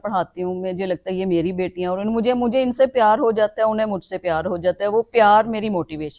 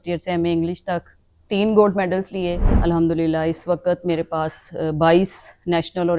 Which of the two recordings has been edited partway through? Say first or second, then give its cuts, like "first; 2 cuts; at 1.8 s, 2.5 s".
second; 1 cut; at 2.6 s